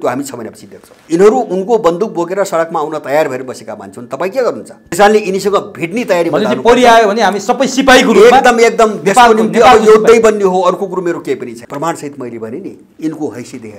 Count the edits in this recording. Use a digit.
3